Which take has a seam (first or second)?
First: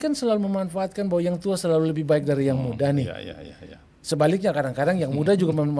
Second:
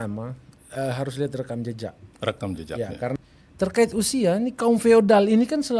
second